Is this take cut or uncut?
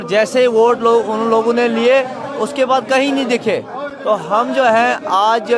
uncut